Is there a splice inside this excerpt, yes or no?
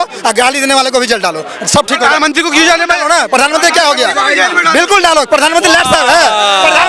no